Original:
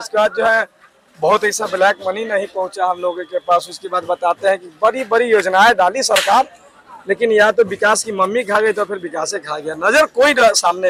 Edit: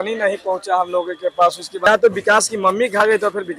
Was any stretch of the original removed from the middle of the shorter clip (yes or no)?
yes